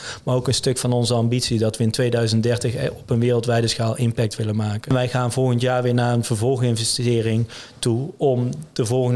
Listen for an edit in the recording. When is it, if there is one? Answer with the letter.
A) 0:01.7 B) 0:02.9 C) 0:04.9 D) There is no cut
C